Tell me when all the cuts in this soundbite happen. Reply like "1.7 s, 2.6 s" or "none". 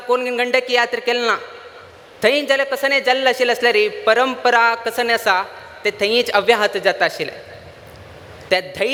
none